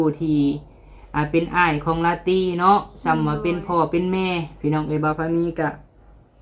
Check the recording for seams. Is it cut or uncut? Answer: uncut